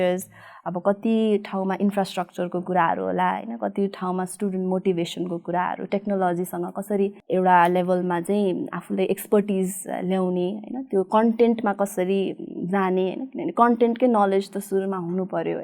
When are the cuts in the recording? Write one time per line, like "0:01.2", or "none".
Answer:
none